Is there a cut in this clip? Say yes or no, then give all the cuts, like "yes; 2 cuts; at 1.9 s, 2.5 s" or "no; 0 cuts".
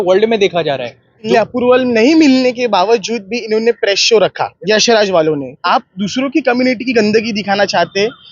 yes; 3 cuts; at 1.3 s, 4.5 s, 5.6 s